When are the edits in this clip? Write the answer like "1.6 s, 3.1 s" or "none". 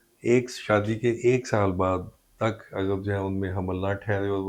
none

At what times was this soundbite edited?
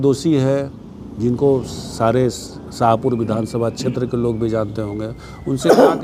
none

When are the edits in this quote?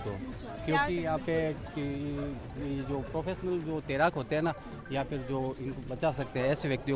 none

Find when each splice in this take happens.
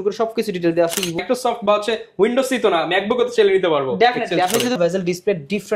1.2 s, 4.8 s

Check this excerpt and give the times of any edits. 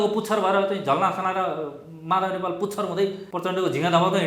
3.3 s

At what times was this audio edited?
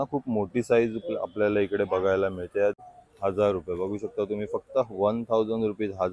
2.8 s

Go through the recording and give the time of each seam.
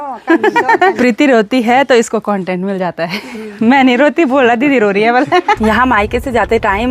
1.0 s, 5.6 s

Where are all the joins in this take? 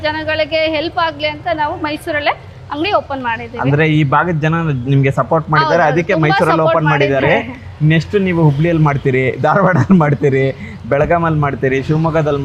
none

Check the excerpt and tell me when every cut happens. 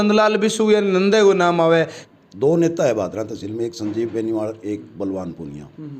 2.0 s

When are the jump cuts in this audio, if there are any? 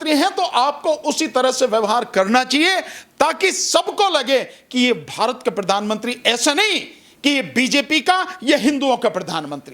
none

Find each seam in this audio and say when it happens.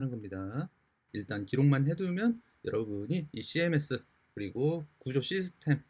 1.1 s

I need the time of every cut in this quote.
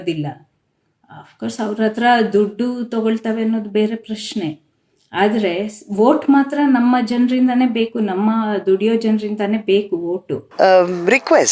10.4 s

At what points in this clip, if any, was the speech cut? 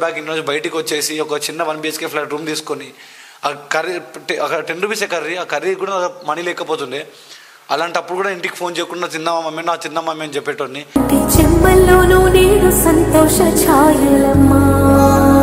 none

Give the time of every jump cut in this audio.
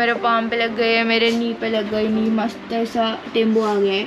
none

